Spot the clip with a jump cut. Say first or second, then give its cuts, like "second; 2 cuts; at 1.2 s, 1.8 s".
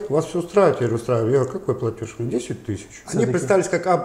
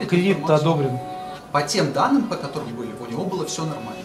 first; 1 cut; at 2.9 s